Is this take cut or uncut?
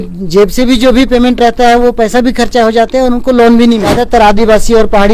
cut